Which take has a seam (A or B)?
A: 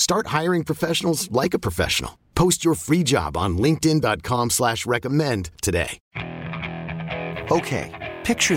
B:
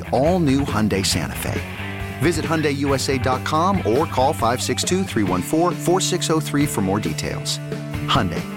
A